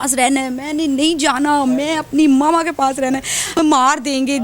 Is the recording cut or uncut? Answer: cut